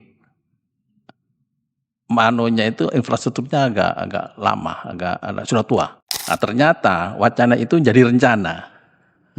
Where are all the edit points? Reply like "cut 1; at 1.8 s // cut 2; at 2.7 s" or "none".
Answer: cut 1; at 6.0 s